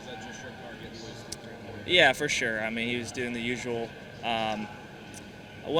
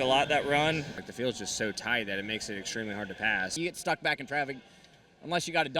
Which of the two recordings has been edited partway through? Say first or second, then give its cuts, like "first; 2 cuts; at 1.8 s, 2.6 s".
second; 2 cuts; at 1.0 s, 3.5 s